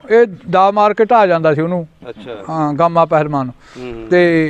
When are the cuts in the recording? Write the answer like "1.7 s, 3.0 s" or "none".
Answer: none